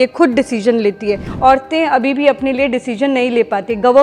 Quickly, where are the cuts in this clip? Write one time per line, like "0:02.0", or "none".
0:01.3